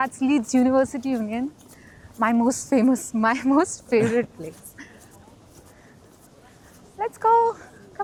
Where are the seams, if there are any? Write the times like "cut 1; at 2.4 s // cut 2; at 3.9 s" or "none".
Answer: none